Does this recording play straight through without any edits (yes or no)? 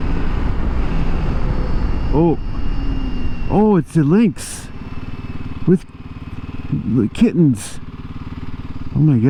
yes